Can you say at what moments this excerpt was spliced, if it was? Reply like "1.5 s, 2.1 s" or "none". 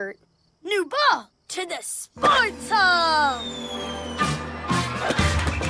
none